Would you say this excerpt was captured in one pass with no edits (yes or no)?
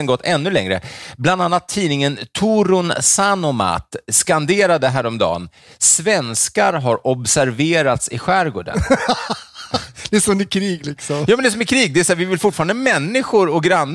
yes